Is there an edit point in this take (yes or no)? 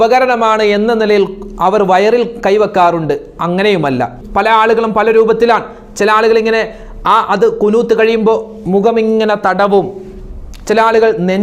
yes